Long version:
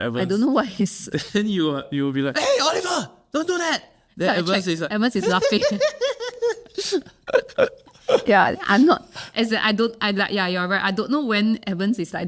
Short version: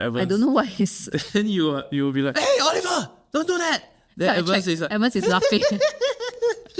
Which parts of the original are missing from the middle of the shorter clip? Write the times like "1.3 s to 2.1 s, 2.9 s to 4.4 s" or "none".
none

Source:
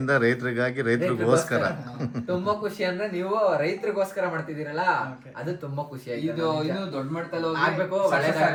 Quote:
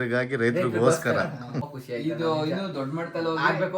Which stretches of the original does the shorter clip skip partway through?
2.1 s to 5.8 s

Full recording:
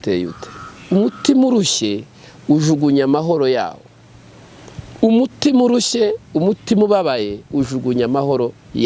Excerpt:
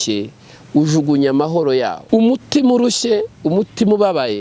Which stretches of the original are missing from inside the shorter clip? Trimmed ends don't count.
3.7 s to 4.9 s

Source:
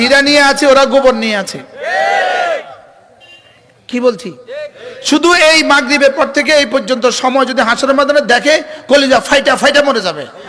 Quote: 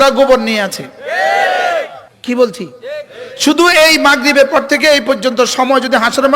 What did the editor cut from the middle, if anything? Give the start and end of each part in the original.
2.8 s to 3.7 s

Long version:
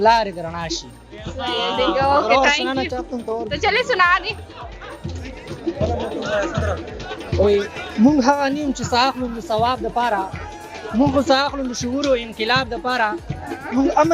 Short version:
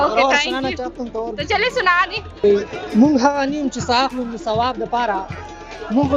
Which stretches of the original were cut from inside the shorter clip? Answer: 4.6 s to 7.5 s

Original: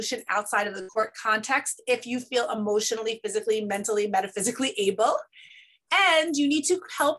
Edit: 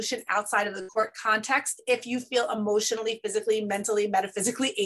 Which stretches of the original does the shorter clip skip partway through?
none

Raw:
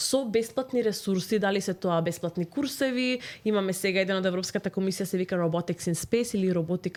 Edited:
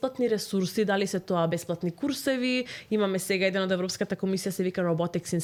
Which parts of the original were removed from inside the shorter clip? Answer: none

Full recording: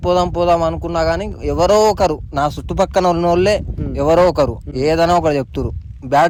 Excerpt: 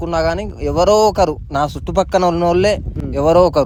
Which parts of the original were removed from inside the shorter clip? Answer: none

